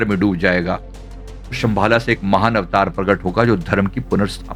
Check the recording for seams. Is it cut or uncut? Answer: uncut